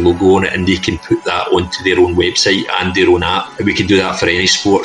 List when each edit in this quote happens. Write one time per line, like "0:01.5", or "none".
0:03.5